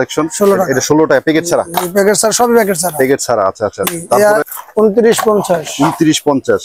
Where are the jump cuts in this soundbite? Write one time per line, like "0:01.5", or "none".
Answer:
0:04.4